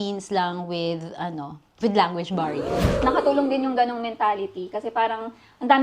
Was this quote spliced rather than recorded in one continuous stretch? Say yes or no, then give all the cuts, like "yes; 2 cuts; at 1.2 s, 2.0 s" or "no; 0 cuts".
yes; 1 cut; at 3.0 s